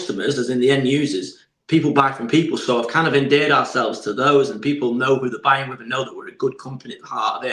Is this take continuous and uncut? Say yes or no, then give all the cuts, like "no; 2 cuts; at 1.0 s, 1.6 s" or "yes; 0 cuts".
yes; 0 cuts